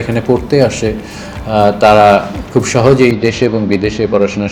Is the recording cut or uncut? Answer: uncut